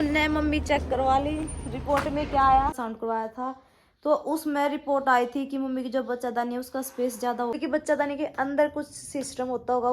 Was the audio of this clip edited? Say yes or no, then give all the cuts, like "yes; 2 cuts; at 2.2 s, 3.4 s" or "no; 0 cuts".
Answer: yes; 2 cuts; at 2.8 s, 7.6 s